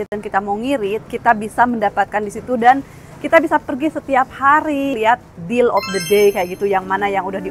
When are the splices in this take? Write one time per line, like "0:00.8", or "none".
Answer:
0:04.9